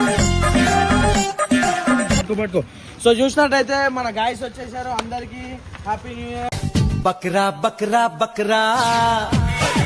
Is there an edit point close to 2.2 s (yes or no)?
yes